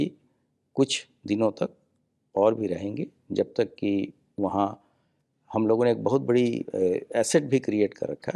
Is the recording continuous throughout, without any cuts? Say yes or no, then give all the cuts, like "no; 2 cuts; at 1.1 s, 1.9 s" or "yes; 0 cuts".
yes; 0 cuts